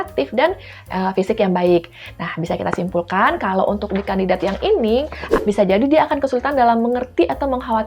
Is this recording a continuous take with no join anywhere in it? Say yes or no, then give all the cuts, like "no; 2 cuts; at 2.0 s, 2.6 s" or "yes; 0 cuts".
no; 1 cut; at 5.3 s